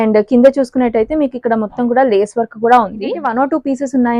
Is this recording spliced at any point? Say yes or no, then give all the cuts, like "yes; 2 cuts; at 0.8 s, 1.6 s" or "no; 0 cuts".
yes; 1 cut; at 3.2 s